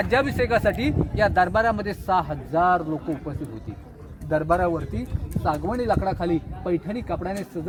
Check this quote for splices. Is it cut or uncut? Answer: uncut